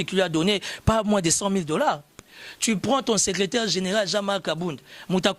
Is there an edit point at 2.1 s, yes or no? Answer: yes